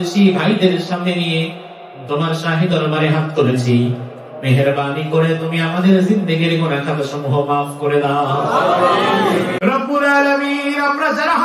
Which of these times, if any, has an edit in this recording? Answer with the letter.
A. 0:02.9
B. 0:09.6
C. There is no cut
B